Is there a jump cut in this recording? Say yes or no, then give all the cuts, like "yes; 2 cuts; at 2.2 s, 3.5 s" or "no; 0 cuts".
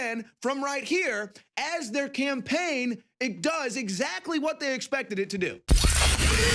yes; 1 cut; at 5.6 s